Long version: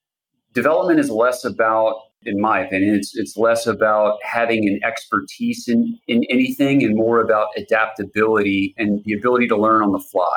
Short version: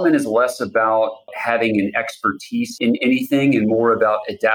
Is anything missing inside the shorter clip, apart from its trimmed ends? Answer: yes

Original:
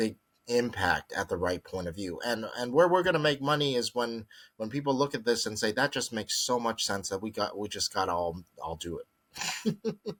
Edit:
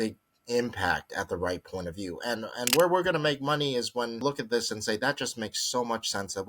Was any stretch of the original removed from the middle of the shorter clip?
yes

